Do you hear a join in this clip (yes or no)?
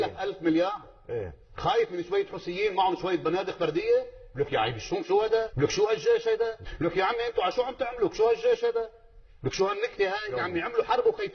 yes